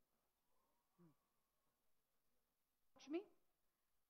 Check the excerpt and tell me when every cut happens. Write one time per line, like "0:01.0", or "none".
0:02.7